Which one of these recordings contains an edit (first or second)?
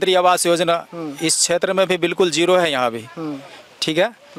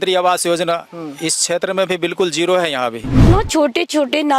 second